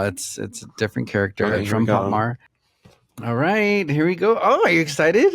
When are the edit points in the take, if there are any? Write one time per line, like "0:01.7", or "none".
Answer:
0:02.4